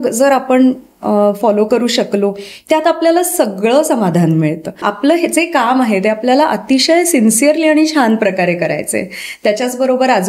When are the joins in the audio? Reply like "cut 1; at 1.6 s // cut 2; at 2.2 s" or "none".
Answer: cut 1; at 4.9 s